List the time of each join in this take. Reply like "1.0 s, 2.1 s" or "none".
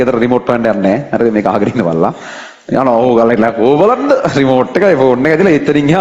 none